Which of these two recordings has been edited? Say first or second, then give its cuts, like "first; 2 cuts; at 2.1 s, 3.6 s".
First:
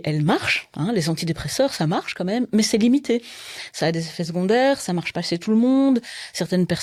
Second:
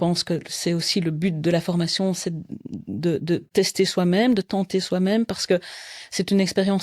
second; 1 cut; at 3.5 s